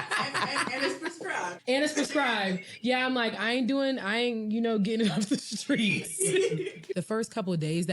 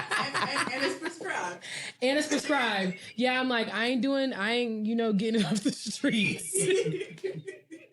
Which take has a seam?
first; 2 cuts; at 1.6 s, 6.9 s

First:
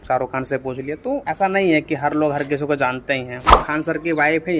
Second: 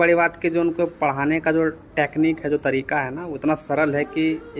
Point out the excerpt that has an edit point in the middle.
first; 1 cut; at 3.5 s

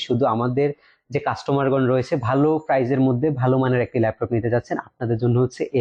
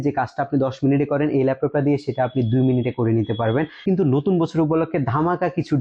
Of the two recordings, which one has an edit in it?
second; 1 cut; at 3.8 s

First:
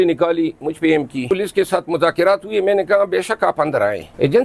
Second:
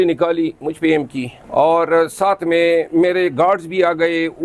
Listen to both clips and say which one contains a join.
first; 1 cut; at 1.3 s

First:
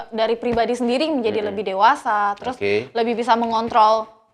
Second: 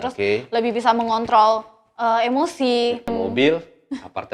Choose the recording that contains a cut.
second; 1 cut; at 3.1 s

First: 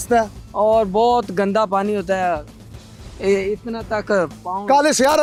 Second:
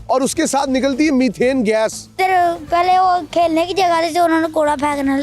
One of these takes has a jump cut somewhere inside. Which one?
second; 1 cut; at 2.2 s

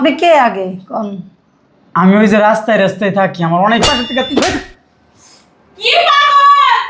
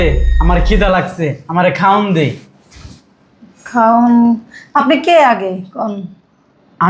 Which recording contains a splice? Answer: first; 1 cut; at 3.9 s

